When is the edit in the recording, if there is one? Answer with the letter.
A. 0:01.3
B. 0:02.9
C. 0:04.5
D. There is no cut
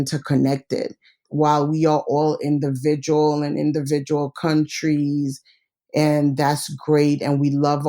A